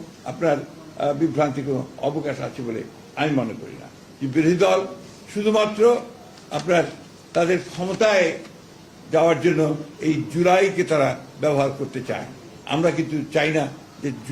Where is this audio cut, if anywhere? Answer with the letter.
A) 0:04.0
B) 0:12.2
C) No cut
A